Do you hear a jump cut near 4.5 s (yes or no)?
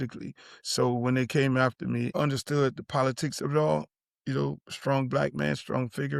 no